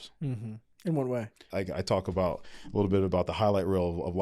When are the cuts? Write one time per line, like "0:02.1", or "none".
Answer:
0:01.4